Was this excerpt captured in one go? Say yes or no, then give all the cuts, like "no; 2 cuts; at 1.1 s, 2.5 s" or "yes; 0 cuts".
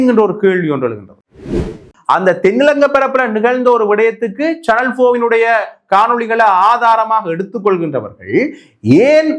no; 1 cut; at 1.6 s